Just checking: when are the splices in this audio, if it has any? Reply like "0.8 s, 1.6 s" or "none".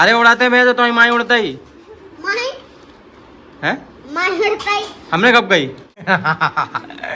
6.0 s